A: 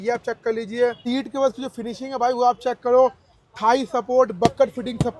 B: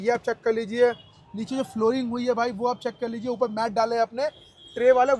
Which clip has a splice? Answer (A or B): A